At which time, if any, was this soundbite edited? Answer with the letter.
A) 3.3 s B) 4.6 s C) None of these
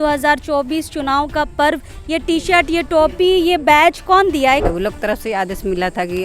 B